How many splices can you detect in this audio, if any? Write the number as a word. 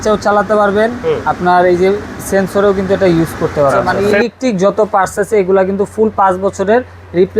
one